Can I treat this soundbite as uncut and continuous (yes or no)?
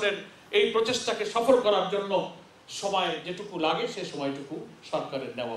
yes